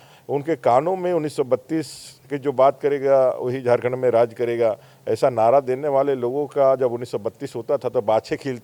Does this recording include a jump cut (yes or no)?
no